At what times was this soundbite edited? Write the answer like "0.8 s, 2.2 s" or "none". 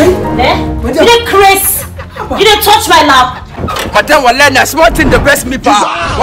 3.6 s